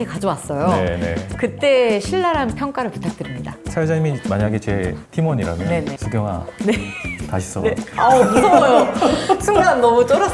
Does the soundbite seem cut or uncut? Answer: cut